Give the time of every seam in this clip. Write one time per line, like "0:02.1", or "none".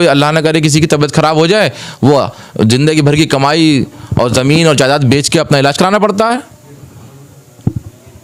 none